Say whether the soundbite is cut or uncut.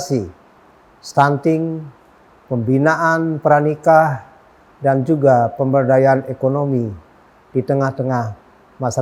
uncut